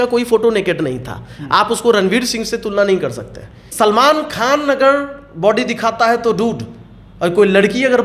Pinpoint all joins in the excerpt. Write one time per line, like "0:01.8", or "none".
0:03.6

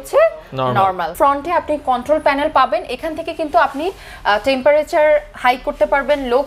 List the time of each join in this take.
0:01.1

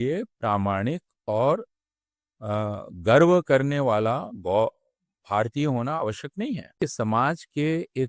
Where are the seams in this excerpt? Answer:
0:06.8

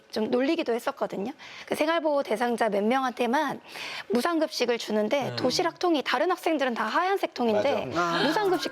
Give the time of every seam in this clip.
0:01.5

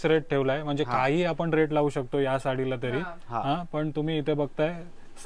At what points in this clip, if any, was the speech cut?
none

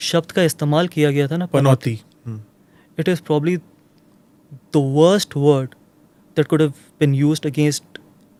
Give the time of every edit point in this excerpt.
none

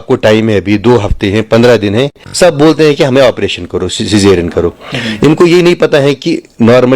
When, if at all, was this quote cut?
0:02.2

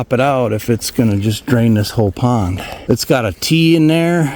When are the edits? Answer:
0:02.7

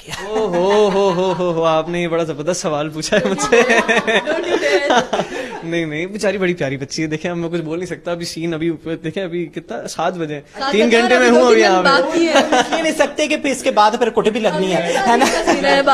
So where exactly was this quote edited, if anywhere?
none

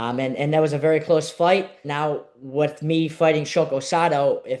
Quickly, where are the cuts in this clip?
0:01.8

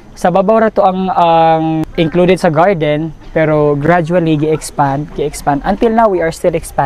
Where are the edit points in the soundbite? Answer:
0:01.8

